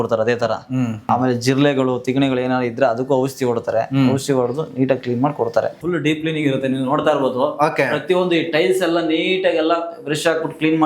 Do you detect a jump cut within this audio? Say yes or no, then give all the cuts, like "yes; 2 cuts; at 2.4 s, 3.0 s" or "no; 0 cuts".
yes; 2 cuts; at 1.0 s, 5.8 s